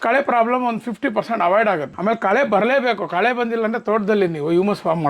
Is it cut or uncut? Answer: cut